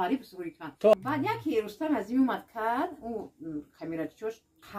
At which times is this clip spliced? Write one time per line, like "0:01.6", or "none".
0:00.9